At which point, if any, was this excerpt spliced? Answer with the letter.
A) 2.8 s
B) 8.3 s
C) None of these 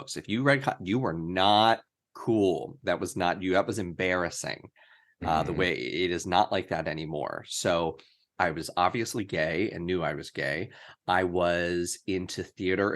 B